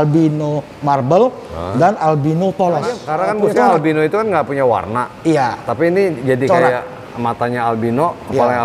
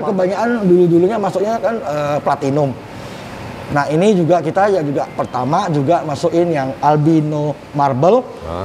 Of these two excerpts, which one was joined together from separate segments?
first; 1 cut; at 3.0 s

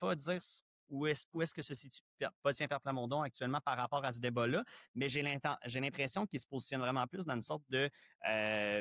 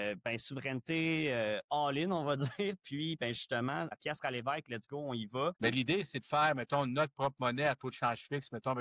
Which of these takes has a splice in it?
second; 2 cuts; at 3.9 s, 5.6 s

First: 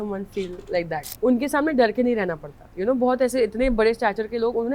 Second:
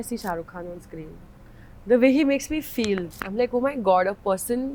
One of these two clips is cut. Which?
first; 1 cut; at 1.0 s

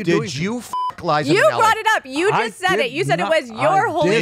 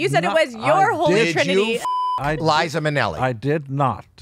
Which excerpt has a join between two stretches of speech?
first; 1 cut; at 2.0 s

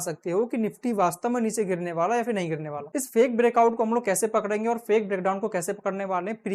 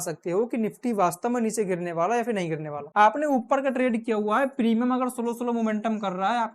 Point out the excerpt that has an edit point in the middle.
first; 1 cut; at 2.8 s

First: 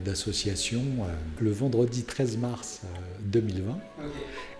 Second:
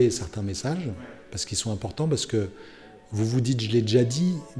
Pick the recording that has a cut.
first; 1 cut; at 1.4 s

